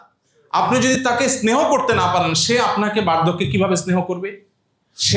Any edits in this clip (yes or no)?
no